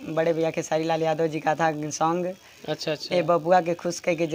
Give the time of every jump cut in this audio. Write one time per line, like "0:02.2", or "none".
none